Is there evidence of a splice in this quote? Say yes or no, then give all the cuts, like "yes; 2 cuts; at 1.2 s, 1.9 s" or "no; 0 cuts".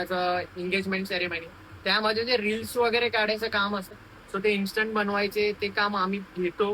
yes; 1 cut; at 3.9 s